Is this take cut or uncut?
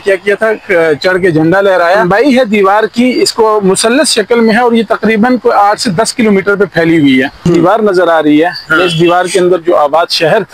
cut